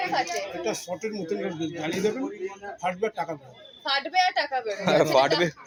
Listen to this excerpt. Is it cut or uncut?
uncut